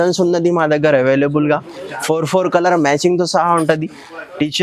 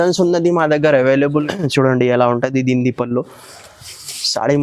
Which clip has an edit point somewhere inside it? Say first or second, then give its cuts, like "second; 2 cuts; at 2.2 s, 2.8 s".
second; 1 cut; at 1.4 s